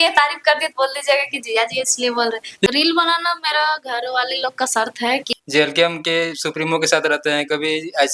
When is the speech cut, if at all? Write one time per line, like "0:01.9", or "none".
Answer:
0:02.7
0:05.3